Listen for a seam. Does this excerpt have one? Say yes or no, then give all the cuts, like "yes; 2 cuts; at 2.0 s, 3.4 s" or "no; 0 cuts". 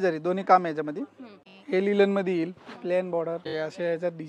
yes; 2 cuts; at 1.2 s, 3.5 s